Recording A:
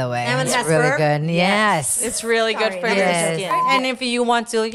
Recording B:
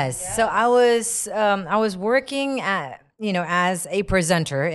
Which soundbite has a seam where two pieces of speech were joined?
A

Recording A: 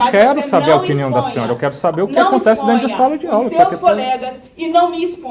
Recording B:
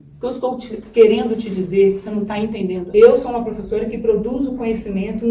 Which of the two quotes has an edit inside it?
B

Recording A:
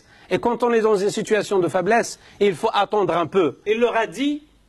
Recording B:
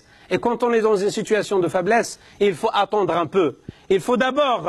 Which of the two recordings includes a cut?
A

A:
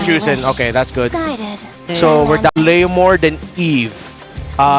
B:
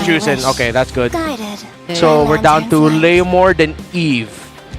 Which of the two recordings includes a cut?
A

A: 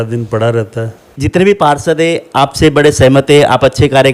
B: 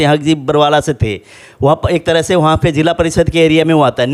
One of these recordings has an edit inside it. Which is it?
A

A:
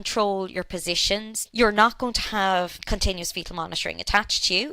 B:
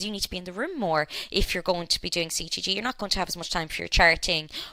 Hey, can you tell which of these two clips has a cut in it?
A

